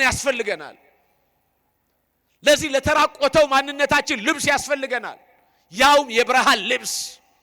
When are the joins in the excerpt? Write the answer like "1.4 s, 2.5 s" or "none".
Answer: none